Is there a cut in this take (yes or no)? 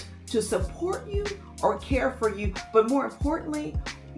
no